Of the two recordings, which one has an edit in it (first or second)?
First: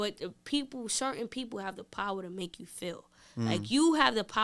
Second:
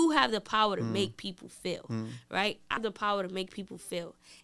second